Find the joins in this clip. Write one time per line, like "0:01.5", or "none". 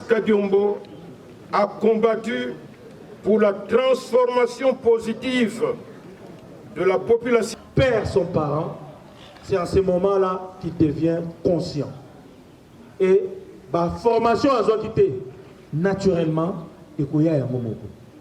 0:07.5